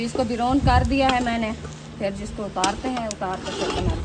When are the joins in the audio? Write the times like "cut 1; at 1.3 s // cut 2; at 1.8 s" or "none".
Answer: none